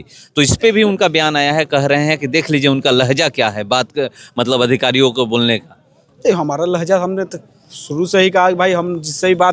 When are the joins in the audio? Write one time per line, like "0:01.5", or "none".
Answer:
none